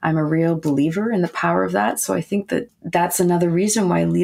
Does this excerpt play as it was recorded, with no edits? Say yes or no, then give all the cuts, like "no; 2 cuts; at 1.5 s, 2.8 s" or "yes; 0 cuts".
no; 1 cut; at 2.8 s